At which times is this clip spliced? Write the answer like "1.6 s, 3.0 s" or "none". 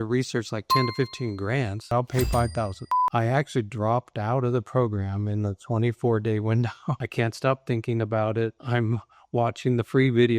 1.9 s, 2.8 s, 7.0 s